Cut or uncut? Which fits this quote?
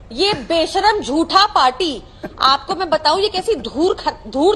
uncut